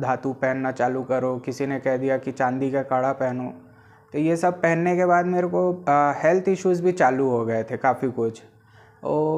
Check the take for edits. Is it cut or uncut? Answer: uncut